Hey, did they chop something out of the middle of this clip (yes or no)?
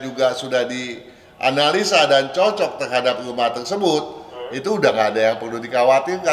no